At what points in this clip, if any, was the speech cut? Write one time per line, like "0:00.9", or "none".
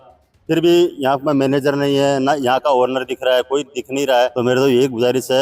0:04.3